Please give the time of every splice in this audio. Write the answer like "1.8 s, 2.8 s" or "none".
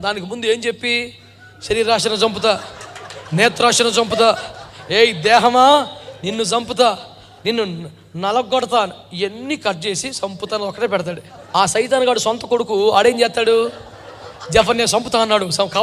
11.3 s

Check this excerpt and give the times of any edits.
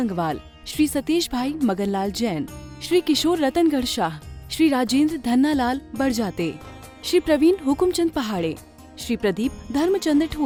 none

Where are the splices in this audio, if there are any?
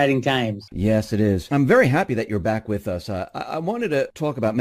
none

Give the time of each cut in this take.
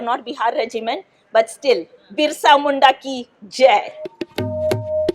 4.2 s

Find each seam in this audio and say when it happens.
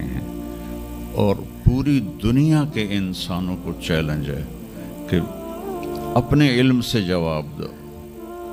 none

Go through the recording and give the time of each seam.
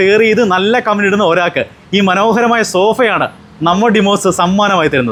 none

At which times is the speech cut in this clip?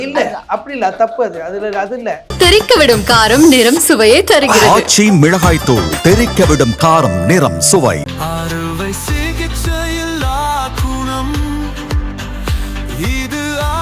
2.3 s

